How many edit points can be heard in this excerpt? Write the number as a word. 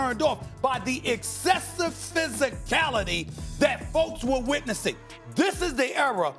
zero